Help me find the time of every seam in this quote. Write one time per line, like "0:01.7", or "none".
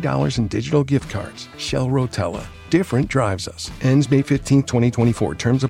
none